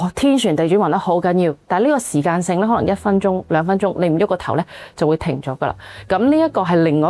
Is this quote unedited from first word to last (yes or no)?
yes